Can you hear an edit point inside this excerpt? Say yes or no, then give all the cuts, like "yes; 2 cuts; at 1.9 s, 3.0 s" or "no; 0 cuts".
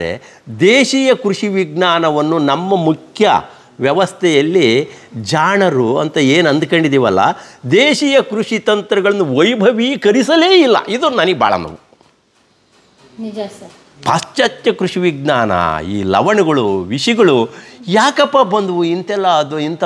no; 0 cuts